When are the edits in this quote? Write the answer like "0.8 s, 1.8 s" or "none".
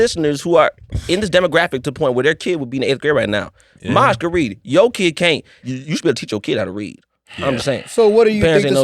5.5 s